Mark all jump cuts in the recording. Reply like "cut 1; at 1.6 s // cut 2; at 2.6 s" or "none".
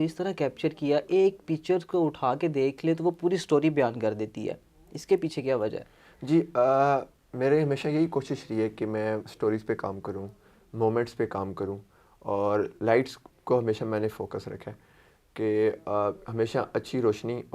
none